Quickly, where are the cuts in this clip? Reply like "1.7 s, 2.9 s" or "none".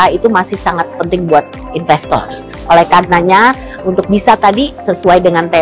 none